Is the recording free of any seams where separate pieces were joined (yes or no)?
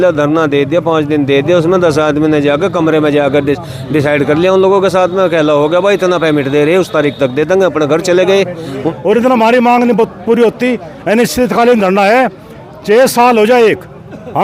no